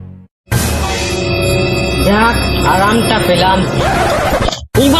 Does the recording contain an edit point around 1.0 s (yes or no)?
yes